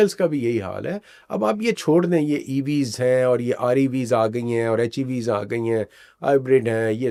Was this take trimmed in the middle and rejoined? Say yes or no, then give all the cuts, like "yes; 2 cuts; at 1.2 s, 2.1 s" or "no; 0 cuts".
no; 0 cuts